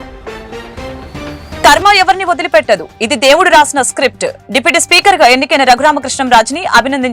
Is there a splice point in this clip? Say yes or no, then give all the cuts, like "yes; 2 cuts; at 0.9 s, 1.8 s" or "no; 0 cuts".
yes; 1 cut; at 1.6 s